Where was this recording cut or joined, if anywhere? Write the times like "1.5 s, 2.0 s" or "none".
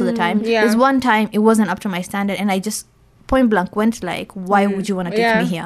none